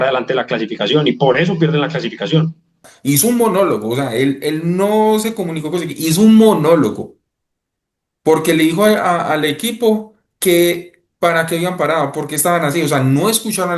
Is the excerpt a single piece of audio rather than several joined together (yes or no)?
no